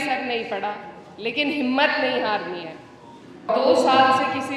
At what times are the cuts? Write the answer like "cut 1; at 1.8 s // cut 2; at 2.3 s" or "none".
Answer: cut 1; at 3.5 s